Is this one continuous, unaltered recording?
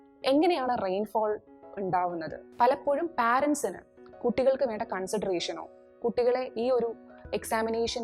no; 1 cut; at 2.4 s

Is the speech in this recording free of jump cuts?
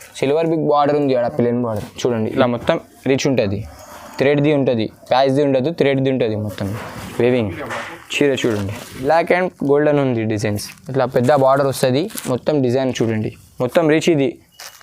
no; 2 cuts; at 2.3 s, 9.0 s

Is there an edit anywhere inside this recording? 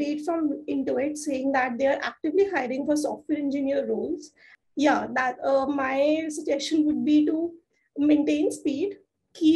yes; 1 cut; at 4.5 s

